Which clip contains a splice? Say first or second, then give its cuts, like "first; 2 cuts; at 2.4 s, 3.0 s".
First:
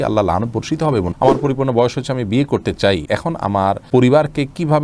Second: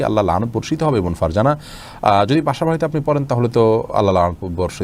first; 2 cuts; at 1.1 s, 3.5 s